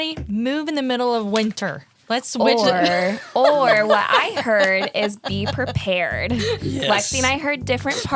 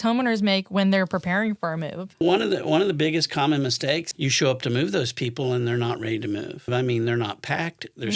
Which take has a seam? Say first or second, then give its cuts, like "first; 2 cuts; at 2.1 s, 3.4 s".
second; 3 cuts; at 2.2 s, 4.1 s, 6.7 s